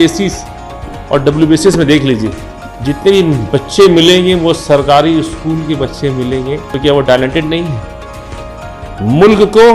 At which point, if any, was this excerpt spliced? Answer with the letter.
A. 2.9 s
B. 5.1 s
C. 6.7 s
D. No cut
C